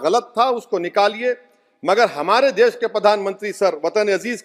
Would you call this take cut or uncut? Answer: uncut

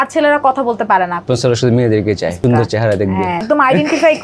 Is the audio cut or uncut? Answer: cut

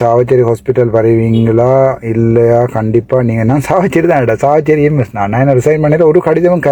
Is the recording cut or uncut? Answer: uncut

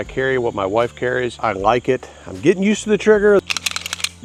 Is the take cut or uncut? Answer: uncut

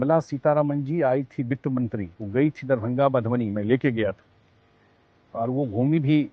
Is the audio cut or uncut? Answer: cut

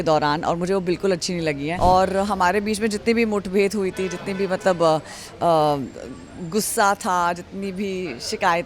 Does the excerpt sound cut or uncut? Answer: cut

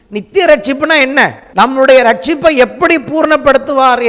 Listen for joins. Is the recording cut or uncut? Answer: cut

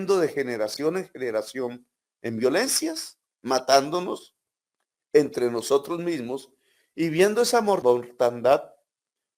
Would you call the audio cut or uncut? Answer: cut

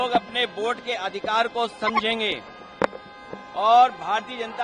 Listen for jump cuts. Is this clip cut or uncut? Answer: uncut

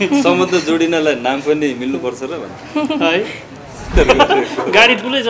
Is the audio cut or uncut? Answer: cut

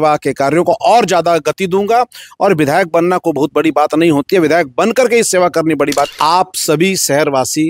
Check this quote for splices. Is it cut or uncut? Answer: cut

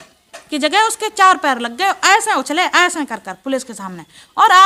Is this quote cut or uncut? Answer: uncut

